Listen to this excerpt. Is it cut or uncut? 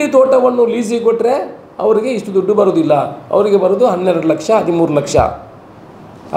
uncut